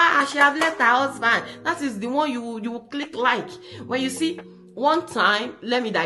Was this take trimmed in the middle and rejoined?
no; 0 cuts

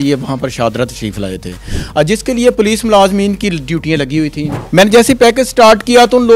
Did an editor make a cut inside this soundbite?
yes; 1 cut; at 4.5 s

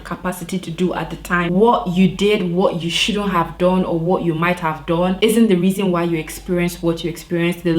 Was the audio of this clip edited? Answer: yes; 1 cut; at 1.5 s

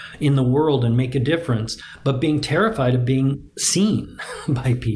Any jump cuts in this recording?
no; 0 cuts

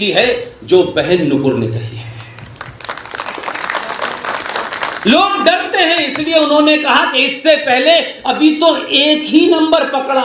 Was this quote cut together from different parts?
no; 0 cuts

